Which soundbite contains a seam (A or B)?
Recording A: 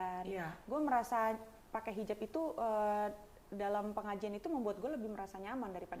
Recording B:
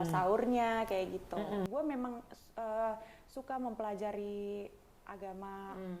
B